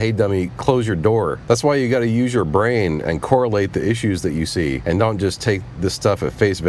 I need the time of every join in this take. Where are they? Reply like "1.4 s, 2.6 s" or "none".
1.4 s, 4.8 s